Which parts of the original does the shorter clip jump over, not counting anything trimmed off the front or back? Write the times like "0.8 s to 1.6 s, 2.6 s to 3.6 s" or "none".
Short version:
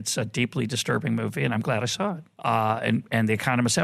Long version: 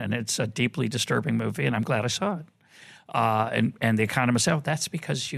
2.5 s to 3.0 s